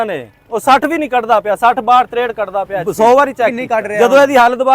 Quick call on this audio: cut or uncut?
cut